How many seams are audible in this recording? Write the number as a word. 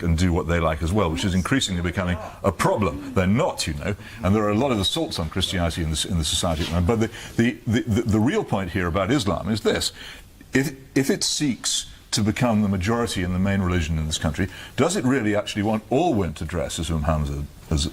one